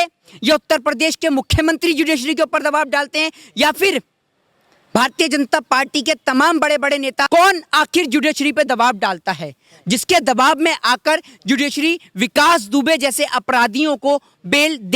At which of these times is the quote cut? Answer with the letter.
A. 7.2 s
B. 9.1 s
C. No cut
A